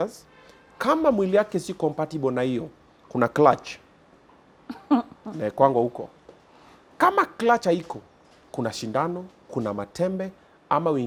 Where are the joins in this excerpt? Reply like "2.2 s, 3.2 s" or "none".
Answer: none